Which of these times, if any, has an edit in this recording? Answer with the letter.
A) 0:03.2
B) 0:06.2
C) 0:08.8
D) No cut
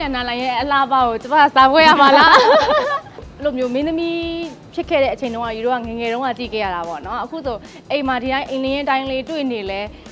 A